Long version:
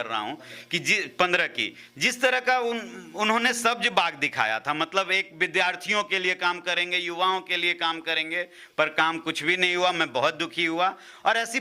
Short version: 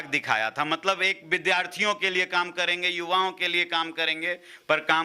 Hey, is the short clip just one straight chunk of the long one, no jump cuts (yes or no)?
yes